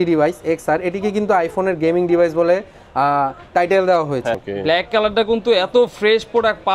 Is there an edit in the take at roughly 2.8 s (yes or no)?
no